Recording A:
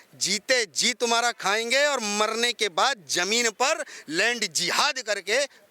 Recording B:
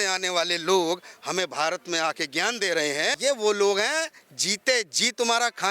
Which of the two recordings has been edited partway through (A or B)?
B